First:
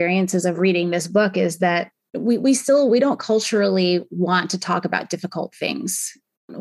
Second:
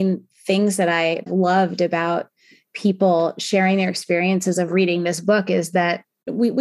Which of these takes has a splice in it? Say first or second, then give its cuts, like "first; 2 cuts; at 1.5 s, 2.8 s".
second; 1 cut; at 1.3 s